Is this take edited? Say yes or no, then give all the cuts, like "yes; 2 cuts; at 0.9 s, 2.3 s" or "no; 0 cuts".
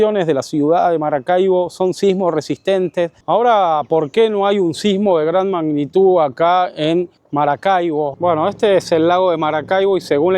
yes; 3 cuts; at 3.2 s, 7.2 s, 8.1 s